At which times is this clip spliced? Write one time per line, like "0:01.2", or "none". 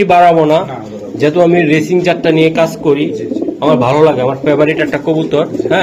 none